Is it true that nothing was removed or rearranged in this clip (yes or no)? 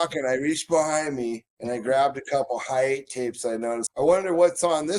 no